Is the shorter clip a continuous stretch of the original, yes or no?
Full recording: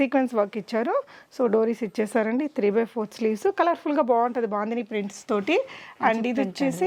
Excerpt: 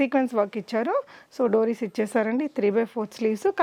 yes